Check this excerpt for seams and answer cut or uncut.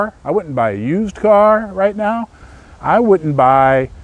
uncut